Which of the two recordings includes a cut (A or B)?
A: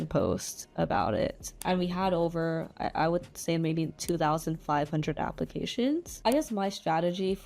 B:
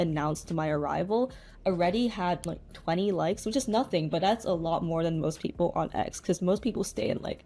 A